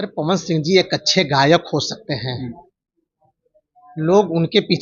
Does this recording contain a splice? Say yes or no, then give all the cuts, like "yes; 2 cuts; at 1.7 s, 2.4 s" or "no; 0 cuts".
no; 0 cuts